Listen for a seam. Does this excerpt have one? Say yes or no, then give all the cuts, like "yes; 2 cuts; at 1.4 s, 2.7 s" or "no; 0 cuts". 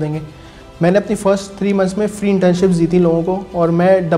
no; 0 cuts